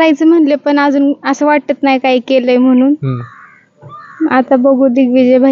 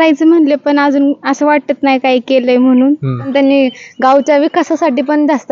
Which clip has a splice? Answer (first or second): second